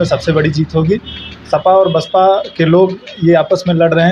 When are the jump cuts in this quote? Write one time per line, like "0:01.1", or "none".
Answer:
none